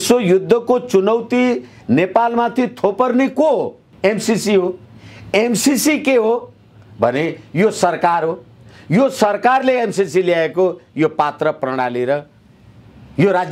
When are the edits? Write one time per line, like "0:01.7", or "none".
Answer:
0:03.9

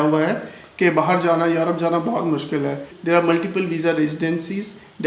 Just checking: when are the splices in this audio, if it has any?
0:02.9

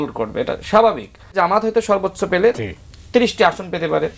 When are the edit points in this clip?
0:01.4

